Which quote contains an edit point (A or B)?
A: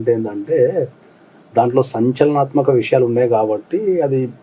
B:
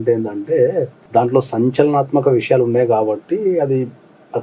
B